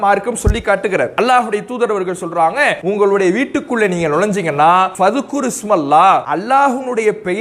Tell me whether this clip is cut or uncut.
cut